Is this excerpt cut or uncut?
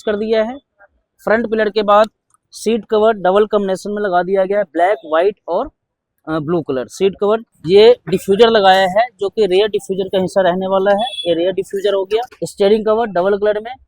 cut